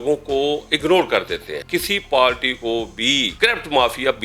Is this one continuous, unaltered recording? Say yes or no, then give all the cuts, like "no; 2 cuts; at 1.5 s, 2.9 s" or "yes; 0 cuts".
no; 2 cuts; at 1.6 s, 3.3 s